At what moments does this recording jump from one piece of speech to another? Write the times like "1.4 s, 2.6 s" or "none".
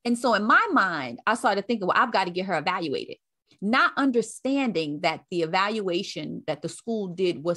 none